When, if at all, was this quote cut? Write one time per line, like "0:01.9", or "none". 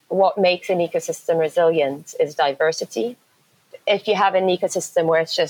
0:03.7